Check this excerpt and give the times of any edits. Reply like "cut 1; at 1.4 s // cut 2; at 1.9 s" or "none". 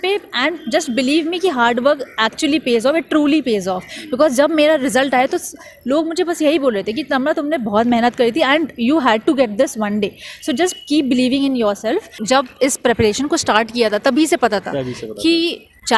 cut 1; at 12.1 s